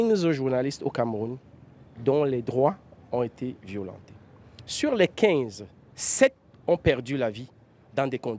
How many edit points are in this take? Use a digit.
0